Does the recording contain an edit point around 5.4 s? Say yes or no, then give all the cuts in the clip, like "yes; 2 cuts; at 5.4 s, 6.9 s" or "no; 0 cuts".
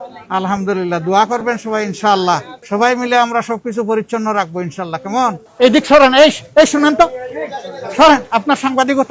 yes; 2 cuts; at 2.5 s, 5.4 s